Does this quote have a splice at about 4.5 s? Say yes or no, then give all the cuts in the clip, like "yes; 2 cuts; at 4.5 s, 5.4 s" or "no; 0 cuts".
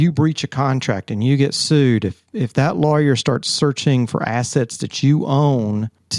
no; 0 cuts